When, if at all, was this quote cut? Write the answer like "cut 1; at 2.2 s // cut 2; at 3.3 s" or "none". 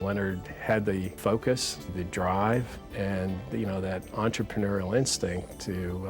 cut 1; at 1.2 s // cut 2; at 1.9 s // cut 3; at 2.8 s